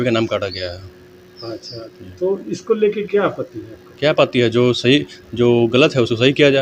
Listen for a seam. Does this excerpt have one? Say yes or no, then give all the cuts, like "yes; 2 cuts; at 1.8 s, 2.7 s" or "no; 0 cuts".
no; 0 cuts